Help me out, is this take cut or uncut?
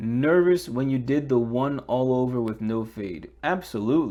uncut